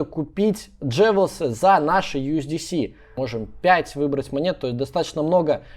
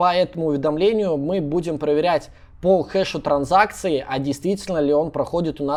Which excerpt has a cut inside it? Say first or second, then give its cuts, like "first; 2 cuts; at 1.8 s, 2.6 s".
first; 1 cut; at 3.1 s